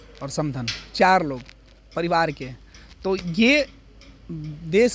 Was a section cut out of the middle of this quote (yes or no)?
no